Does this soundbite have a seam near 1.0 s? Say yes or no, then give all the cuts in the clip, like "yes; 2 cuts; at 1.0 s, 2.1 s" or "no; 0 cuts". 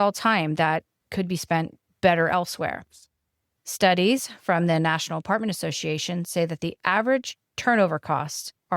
yes; 1 cut; at 1.0 s